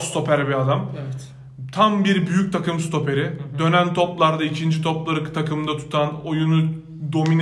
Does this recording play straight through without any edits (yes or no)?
yes